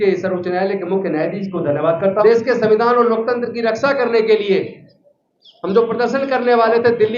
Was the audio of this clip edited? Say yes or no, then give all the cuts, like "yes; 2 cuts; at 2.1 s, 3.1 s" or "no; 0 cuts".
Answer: yes; 1 cut; at 2.2 s